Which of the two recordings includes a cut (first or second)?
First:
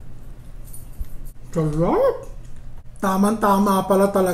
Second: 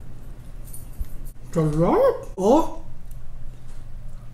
second